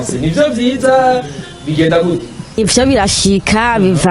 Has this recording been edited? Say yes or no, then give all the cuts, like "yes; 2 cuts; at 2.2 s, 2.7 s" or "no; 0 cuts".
yes; 1 cut; at 2.6 s